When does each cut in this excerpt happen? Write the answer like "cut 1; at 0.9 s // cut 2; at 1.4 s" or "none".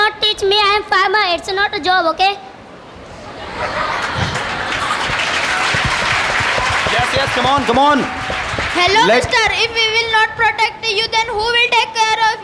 none